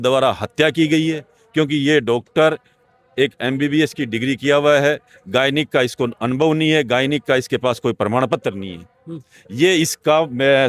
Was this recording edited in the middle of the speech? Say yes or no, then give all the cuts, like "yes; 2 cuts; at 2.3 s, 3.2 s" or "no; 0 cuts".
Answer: no; 0 cuts